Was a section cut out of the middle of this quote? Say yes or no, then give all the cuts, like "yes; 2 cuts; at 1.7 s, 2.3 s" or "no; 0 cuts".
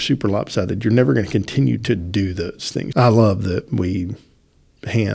yes; 1 cut; at 2.9 s